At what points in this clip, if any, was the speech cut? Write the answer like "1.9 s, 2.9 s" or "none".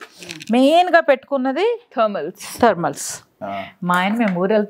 3.6 s